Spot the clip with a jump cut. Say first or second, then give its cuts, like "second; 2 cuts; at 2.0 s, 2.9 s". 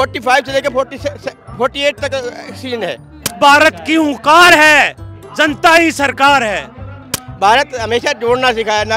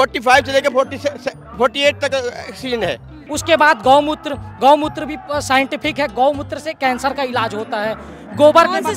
first; 2 cuts; at 3.3 s, 7.1 s